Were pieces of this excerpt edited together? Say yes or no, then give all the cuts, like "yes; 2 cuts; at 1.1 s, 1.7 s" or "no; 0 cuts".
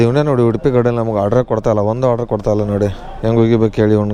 no; 0 cuts